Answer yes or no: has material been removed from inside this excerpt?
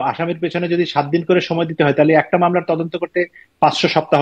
no